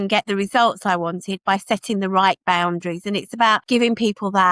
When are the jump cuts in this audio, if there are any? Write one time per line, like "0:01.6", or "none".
0:03.6